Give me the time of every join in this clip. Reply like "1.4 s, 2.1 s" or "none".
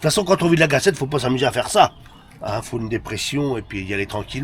none